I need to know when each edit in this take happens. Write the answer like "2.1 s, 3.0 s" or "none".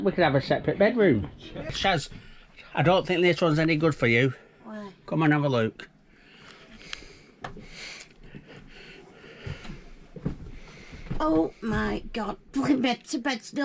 1.8 s